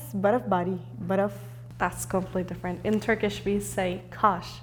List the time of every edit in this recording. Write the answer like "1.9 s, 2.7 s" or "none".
none